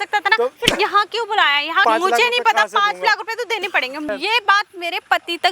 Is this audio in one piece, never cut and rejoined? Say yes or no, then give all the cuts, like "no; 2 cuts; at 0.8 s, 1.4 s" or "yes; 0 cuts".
no; 2 cuts; at 1.8 s, 4.0 s